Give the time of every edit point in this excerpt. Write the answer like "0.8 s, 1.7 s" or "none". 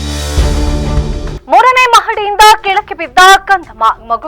1.3 s